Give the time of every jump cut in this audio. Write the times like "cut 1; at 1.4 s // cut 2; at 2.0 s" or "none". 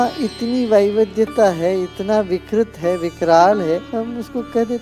cut 1; at 3.9 s